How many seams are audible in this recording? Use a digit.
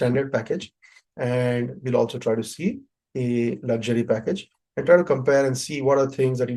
0